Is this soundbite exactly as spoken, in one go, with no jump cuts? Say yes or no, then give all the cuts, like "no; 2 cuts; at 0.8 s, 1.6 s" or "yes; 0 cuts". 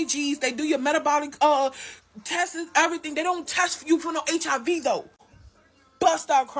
no; 1 cut; at 5.1 s